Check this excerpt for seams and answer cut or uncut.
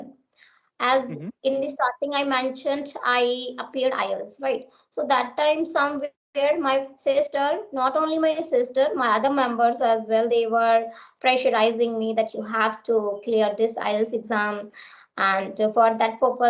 uncut